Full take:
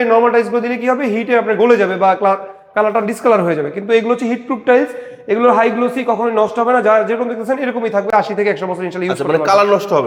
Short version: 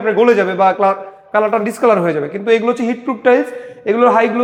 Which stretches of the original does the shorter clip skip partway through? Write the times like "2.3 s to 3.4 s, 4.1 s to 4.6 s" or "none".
none